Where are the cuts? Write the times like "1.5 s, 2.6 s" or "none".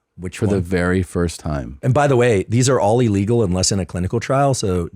1.7 s